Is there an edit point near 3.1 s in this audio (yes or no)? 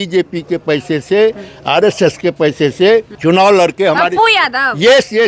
yes